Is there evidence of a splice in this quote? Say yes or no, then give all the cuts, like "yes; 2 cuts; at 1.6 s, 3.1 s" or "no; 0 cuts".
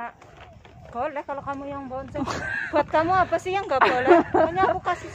no; 0 cuts